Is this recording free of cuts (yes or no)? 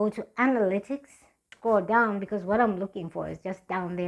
no